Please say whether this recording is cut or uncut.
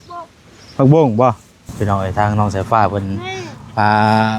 cut